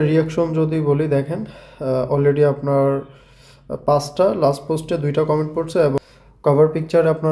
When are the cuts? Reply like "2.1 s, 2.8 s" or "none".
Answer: none